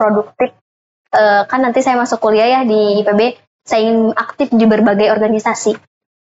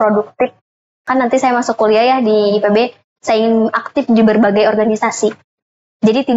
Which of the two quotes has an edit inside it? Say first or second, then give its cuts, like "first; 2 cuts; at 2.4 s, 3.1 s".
second; 1 cut; at 1.0 s